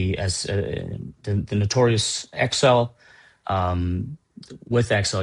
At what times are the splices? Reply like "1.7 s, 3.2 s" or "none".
none